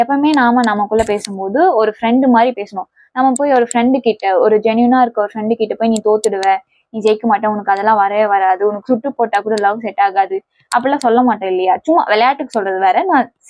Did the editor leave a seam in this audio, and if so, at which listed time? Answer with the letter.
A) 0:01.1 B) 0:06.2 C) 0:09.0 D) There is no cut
D